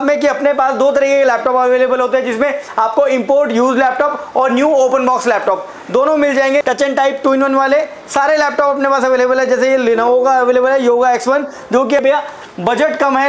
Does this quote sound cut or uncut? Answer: cut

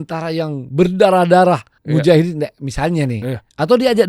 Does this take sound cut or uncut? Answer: cut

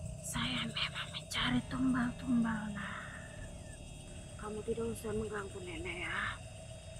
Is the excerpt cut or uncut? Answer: cut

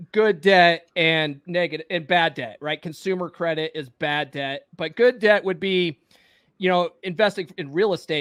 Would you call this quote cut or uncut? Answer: uncut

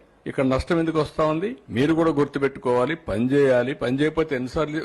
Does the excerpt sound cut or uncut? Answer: cut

